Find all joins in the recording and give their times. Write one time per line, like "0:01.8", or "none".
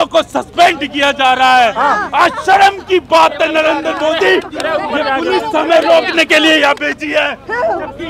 none